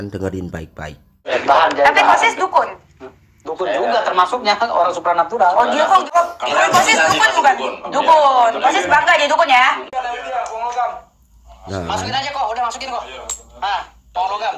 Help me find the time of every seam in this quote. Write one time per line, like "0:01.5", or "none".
0:01.2
0:06.1
0:09.6